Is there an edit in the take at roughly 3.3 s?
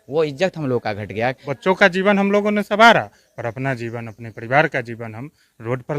no; 1 cut; at 1.5 s

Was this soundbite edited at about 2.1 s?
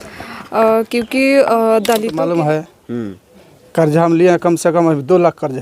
yes; 1 cut; at 2.1 s

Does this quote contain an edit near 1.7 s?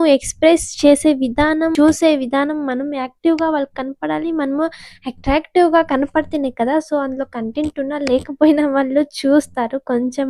yes; 1 cut; at 1.7 s

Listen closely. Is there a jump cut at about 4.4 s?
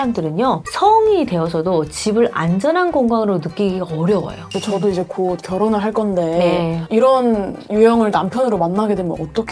yes; 1 cut; at 4.4 s

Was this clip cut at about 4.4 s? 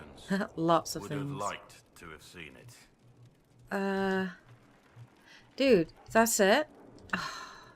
yes; 1 cut; at 4.4 s

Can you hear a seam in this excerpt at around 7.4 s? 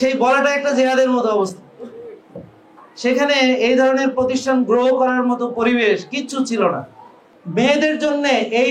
yes; 1 cut; at 7.4 s

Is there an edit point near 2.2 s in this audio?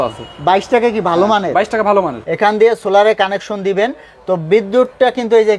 yes; 1 cut; at 2.2 s

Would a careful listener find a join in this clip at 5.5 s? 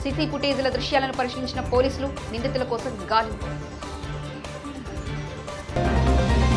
yes; 1 cut; at 5.5 s

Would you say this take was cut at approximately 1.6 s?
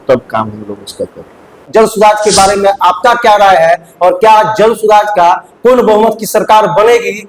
yes; 1 cut; at 1.6 s

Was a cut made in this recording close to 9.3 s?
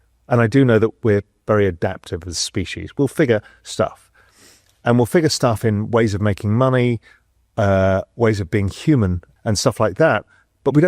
yes; 1 cut; at 9.3 s

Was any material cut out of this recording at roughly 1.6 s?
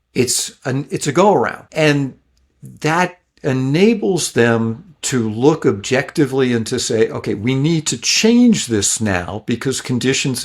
yes; 1 cut; at 1.6 s

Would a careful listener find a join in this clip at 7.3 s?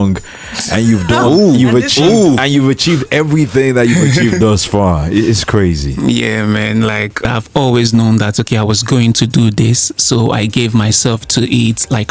yes; 1 cut; at 7.3 s

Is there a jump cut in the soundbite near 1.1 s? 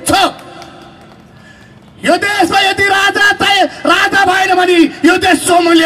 no; 0 cuts

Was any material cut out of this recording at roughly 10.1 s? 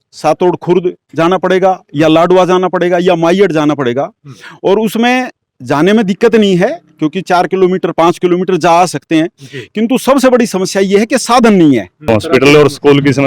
no; 1 cut; at 12.1 s

